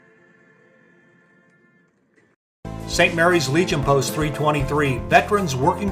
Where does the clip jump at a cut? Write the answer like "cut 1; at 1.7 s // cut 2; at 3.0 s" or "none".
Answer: cut 1; at 2.4 s